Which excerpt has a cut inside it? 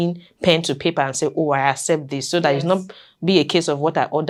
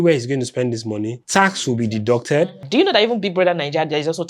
second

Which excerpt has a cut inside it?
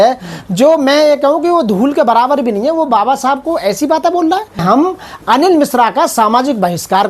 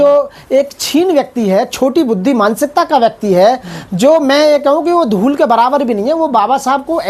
first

